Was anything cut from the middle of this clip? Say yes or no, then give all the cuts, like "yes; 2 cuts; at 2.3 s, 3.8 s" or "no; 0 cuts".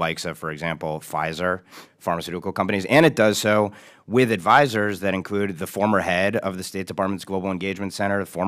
no; 0 cuts